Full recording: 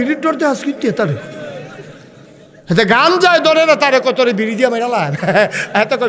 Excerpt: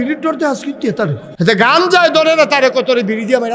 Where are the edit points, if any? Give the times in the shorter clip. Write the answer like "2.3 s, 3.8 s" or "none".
1.2 s